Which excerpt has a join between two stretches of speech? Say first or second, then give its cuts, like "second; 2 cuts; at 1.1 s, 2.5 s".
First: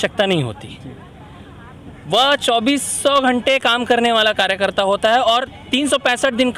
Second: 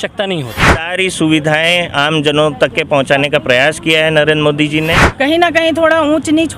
second; 2 cuts; at 0.9 s, 5.1 s